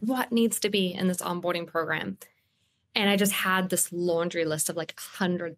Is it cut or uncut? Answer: uncut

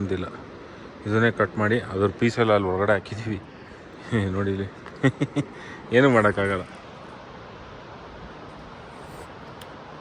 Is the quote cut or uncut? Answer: uncut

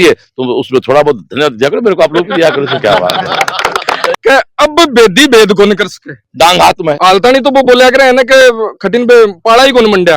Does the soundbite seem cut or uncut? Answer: cut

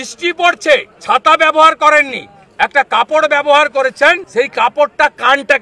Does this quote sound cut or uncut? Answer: cut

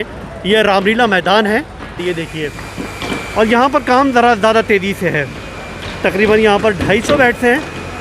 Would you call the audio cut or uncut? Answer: cut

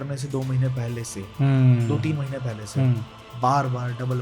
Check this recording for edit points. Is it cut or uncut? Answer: uncut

